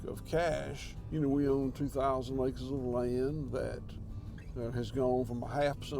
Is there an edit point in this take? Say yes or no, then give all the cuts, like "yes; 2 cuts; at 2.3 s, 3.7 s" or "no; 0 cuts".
no; 0 cuts